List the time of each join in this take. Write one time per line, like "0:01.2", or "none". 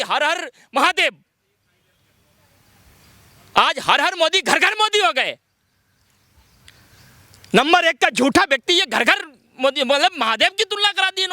none